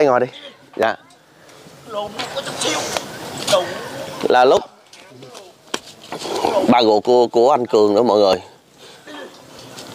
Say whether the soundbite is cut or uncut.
uncut